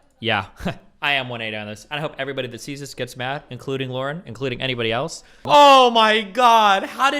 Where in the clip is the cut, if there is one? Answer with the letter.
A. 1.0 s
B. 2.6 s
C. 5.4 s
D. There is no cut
C